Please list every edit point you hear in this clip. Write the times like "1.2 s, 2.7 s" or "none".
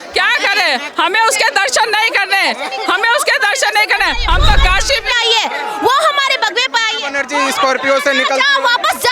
none